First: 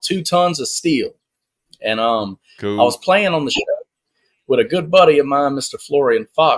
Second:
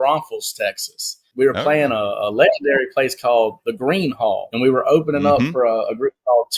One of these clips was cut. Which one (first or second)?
second